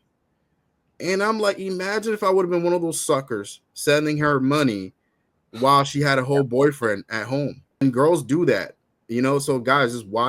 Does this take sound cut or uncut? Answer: cut